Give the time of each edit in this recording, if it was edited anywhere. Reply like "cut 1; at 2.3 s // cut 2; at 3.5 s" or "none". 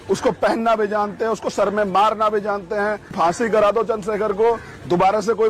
cut 1; at 3.1 s